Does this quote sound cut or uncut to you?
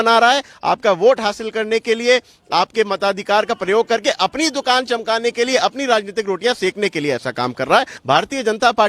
cut